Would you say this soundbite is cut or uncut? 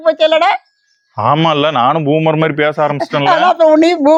uncut